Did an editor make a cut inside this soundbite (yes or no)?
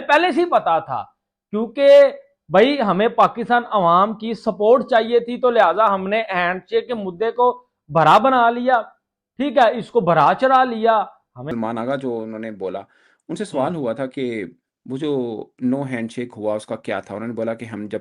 yes